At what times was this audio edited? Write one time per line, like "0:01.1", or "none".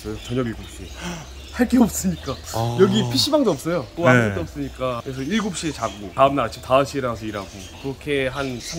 none